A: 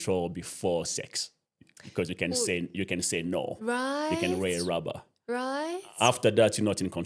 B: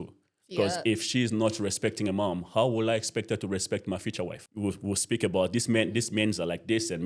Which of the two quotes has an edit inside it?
B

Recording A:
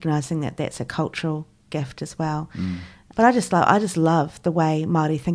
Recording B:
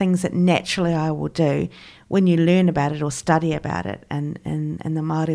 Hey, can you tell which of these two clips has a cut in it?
A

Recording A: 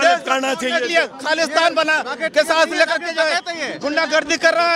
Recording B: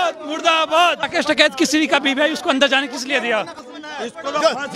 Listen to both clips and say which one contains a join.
B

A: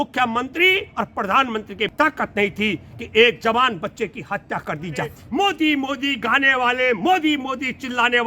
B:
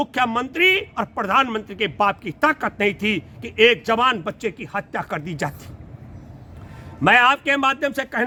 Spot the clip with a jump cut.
A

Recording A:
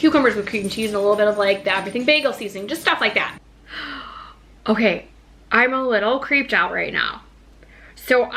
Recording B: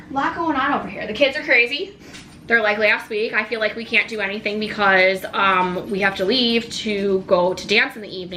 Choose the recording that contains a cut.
A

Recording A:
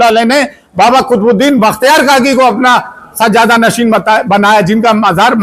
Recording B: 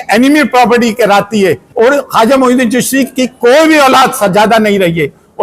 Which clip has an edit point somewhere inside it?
B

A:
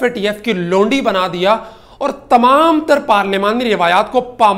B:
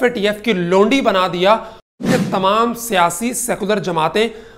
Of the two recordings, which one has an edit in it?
B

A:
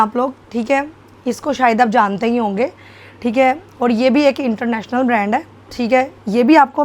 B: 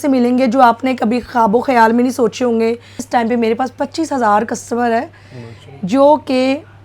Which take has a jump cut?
B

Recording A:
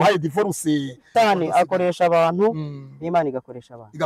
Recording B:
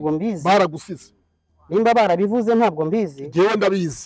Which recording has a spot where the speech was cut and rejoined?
A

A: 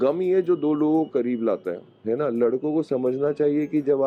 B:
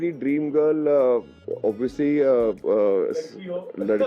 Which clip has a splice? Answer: B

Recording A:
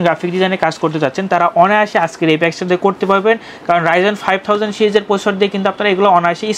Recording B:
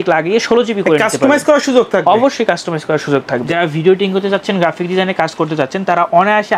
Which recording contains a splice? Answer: B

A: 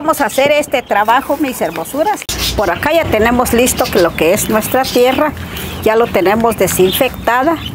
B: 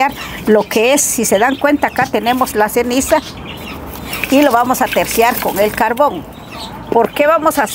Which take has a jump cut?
A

